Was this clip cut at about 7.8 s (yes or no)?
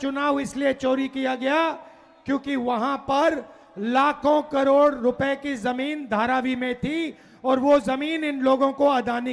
no